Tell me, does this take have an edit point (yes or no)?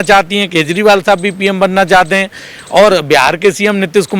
no